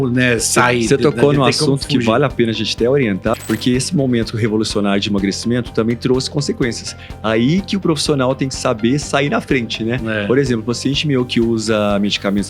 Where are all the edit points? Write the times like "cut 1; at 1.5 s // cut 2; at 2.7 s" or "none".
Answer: cut 1; at 3.3 s